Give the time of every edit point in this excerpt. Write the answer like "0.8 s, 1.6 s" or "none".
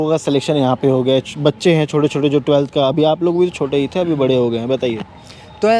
none